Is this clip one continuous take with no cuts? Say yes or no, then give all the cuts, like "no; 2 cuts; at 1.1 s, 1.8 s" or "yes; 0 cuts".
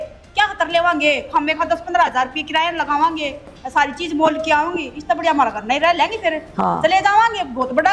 yes; 0 cuts